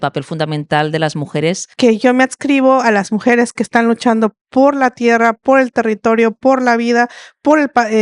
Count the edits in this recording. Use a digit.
1